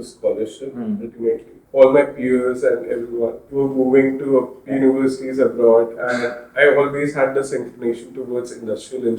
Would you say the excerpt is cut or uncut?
cut